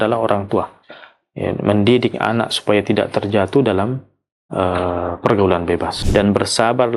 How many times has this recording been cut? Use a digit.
1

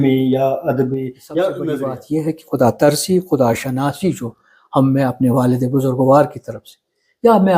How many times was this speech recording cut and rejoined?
1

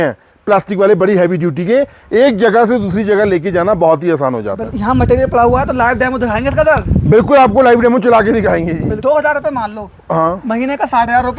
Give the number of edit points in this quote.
2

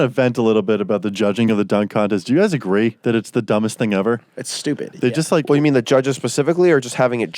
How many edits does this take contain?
1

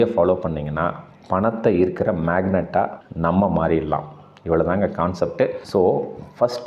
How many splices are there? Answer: 0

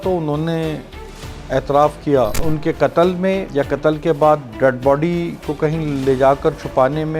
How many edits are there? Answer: 2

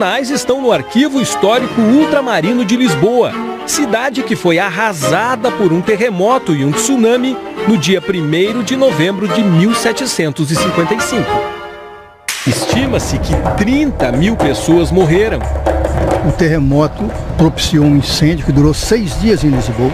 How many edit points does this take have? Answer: 1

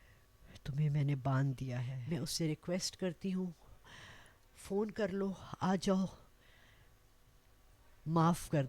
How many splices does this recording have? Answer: 1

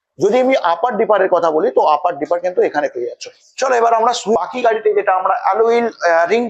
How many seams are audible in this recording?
1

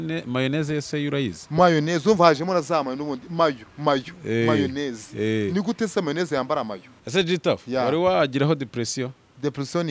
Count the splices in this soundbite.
1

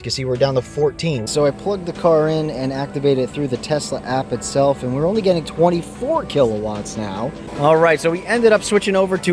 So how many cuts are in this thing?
2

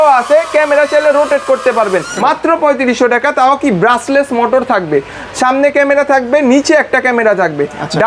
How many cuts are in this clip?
1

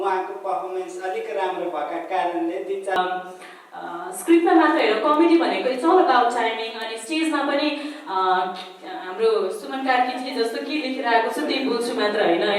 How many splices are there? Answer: 1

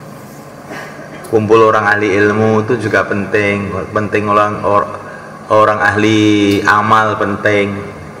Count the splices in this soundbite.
0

